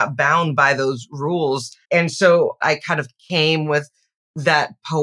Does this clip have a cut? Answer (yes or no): yes